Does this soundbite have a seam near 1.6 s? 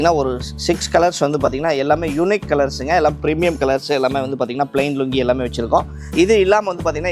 no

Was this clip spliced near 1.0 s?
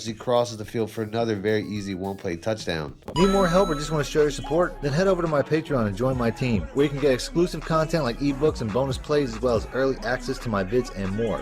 no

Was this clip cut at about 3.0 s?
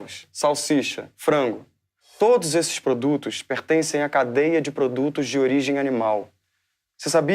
yes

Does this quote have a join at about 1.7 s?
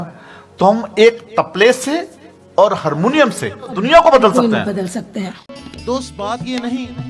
no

